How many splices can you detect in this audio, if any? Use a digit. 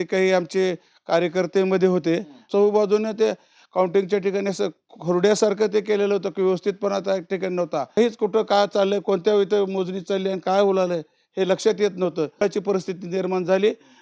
3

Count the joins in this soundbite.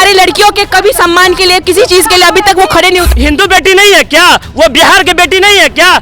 1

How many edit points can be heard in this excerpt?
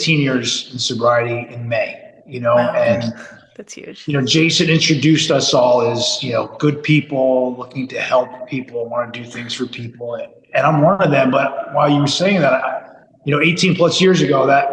0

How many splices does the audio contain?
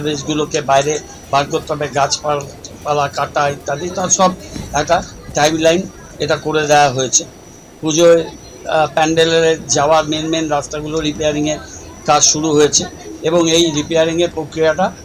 0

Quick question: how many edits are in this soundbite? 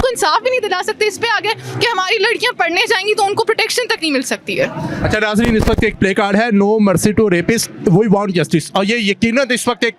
0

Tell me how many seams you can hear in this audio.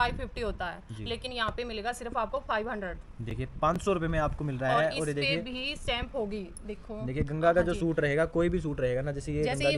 0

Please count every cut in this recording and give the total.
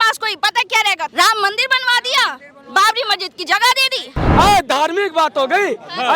2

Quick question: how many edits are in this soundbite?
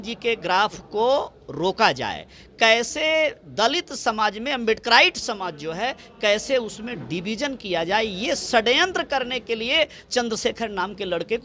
0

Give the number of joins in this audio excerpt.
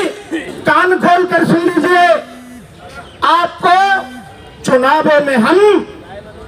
0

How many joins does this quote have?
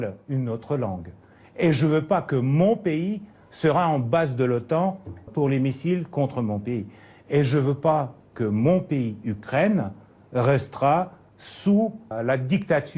1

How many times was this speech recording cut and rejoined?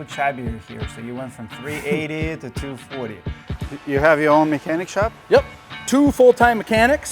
1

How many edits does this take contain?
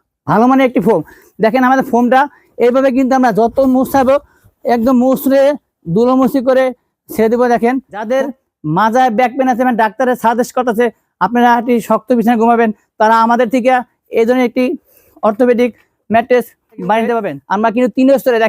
2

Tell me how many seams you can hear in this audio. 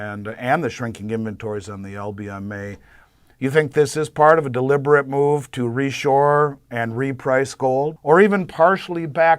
1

